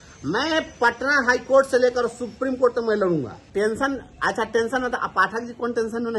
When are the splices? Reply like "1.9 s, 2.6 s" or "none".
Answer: 3.4 s